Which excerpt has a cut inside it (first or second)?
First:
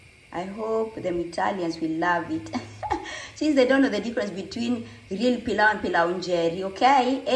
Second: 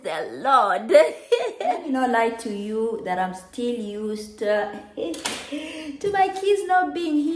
second